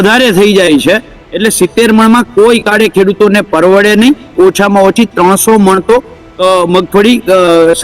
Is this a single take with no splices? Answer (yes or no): no